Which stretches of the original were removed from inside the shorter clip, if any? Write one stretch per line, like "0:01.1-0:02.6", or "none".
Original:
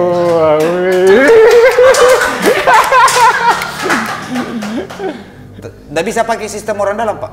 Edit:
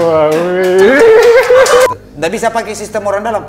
0:02.2-0:05.7